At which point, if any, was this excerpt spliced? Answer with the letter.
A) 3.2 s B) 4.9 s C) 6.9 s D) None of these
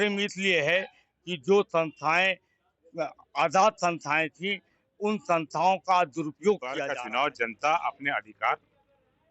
C